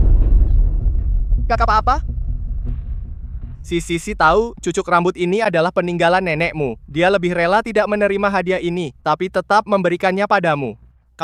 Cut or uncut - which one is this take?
uncut